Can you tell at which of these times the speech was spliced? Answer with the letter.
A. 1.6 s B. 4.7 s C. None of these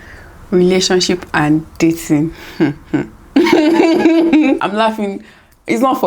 B